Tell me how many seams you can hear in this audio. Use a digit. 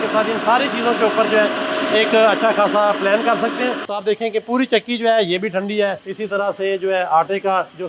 1